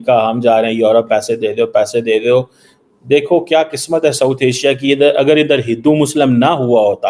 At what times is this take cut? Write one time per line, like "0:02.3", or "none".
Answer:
none